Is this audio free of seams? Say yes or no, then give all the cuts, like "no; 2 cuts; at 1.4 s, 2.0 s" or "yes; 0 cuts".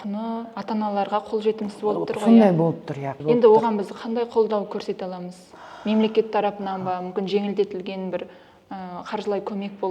no; 1 cut; at 3.1 s